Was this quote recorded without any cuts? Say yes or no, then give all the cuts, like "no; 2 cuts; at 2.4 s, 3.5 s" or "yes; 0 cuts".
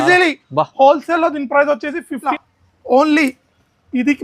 no; 1 cut; at 2.3 s